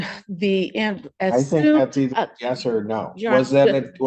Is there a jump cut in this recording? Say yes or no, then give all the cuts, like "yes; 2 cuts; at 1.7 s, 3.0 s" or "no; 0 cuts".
no; 0 cuts